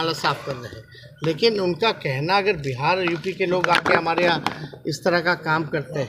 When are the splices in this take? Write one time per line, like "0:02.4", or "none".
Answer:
none

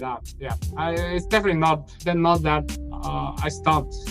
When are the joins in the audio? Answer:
0:01.9

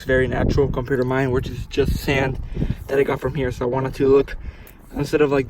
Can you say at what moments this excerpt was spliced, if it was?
none

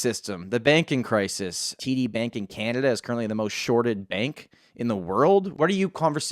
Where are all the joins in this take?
0:01.8
0:05.5

